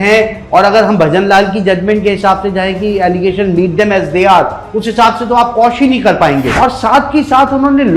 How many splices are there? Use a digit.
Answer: 1